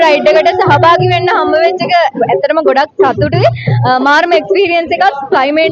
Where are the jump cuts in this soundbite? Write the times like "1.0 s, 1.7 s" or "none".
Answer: none